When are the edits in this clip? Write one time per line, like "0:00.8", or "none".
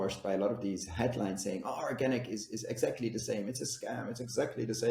none